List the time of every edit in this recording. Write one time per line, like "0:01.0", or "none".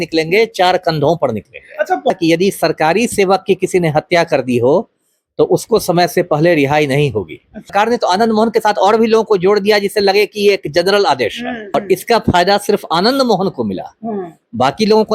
0:02.1
0:07.7
0:11.7